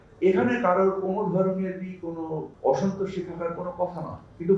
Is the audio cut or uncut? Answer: cut